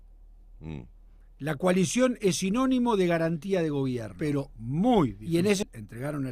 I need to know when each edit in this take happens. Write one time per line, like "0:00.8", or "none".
0:04.1